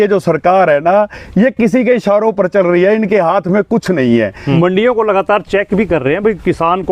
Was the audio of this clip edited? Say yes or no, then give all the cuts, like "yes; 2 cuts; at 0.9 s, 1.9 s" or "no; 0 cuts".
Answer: yes; 1 cut; at 4.5 s